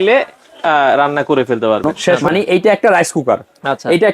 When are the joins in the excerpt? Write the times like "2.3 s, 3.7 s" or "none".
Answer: 2.2 s